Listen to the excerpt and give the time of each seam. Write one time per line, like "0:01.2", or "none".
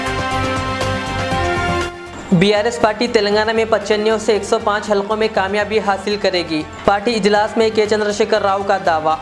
0:01.8